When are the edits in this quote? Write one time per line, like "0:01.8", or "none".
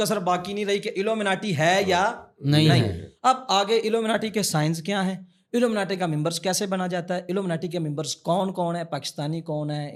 none